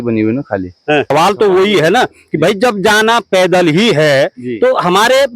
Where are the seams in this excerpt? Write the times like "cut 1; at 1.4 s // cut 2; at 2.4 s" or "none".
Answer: cut 1; at 1.1 s

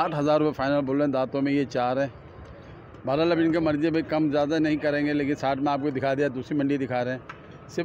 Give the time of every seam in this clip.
none

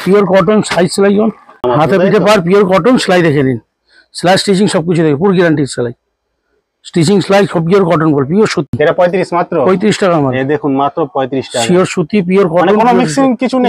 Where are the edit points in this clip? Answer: cut 1; at 1.6 s // cut 2; at 8.8 s

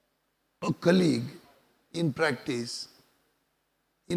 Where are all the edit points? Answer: none

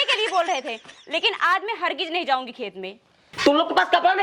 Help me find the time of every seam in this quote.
cut 1; at 3.2 s

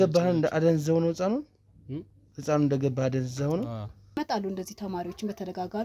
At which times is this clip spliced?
cut 1; at 4.2 s

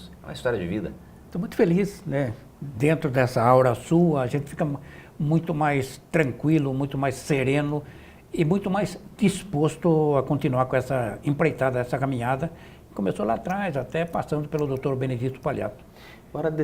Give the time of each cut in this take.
cut 1; at 6.7 s

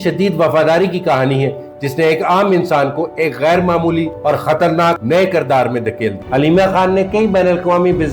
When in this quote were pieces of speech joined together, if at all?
cut 1; at 6.2 s

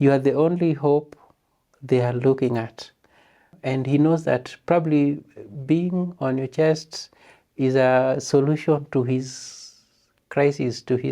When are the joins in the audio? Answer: cut 1; at 3.5 s

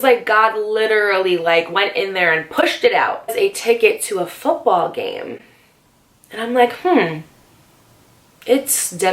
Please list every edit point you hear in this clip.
none

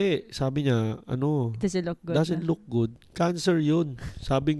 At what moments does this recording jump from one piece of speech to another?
none

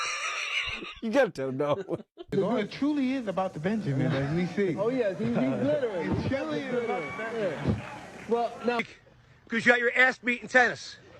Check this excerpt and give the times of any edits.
cut 1; at 2.1 s // cut 2; at 8.8 s

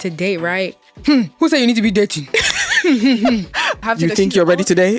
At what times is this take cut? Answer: cut 1; at 0.9 s // cut 2; at 3.8 s

